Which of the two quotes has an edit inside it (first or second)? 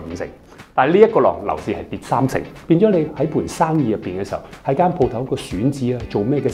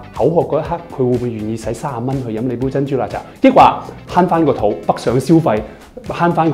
first